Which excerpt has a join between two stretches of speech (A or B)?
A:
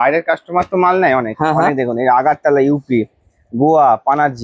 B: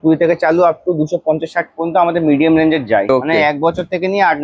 B